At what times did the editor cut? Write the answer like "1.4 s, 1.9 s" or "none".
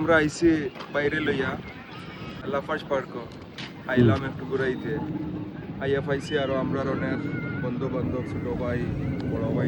2.4 s

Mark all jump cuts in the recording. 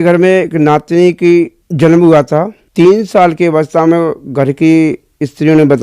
1.6 s, 2.6 s

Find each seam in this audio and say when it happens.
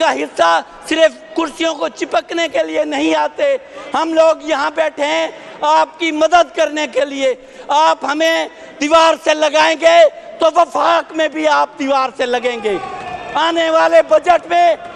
none

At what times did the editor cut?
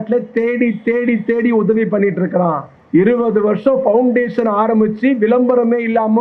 2.7 s

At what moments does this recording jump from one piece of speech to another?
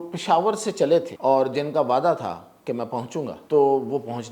1.1 s, 3.4 s

